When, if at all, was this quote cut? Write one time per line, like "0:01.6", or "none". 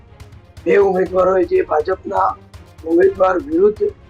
none